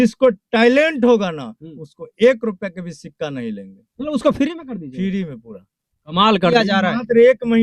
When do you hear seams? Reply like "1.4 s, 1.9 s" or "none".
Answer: 6.5 s